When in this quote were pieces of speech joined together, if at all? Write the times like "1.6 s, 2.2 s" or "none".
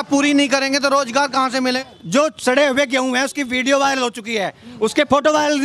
1.8 s